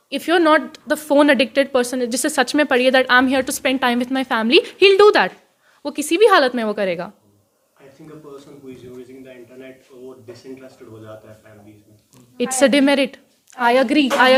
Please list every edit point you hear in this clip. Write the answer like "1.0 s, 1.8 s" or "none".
none